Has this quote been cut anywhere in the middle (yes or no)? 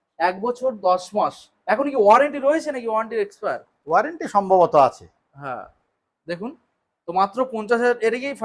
no